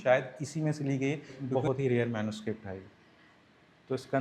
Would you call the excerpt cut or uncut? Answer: cut